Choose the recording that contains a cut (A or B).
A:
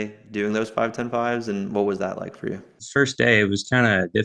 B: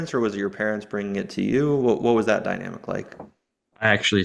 A